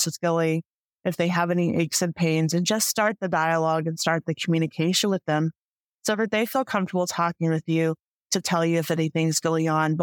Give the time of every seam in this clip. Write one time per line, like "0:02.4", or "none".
none